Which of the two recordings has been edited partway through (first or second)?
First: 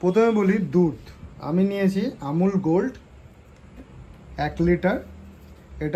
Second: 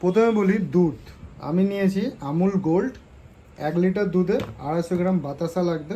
second